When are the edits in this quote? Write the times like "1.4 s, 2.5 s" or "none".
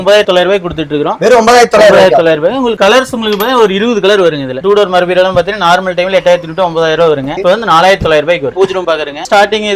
4.6 s, 8.5 s